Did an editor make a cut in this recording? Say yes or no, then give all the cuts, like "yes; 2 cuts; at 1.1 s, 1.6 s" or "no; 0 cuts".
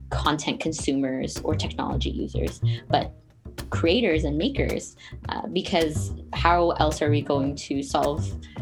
no; 0 cuts